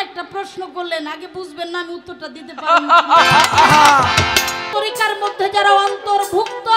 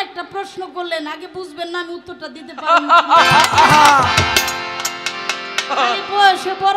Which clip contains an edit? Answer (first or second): first